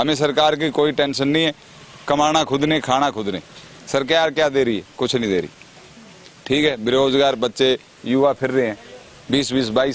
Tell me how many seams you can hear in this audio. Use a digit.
0